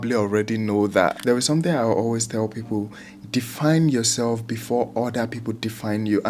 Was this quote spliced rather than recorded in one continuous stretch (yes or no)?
yes